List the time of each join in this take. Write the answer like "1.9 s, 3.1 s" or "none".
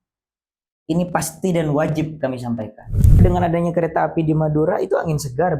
3.2 s